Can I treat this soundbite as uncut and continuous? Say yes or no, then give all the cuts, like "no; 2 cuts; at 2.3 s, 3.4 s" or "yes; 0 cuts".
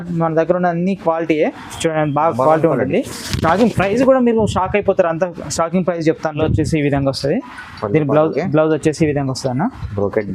no; 1 cut; at 6.4 s